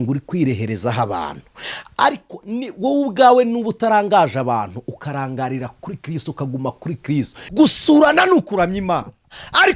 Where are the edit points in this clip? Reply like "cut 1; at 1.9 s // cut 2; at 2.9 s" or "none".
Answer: cut 1; at 7.4 s